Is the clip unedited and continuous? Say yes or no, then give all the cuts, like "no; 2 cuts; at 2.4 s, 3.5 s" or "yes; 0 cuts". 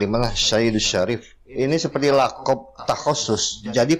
no; 1 cut; at 1.4 s